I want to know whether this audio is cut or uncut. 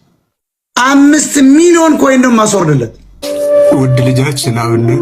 cut